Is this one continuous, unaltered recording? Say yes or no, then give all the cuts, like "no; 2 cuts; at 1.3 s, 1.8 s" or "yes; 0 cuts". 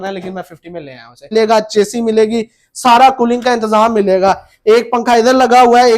no; 1 cut; at 1.3 s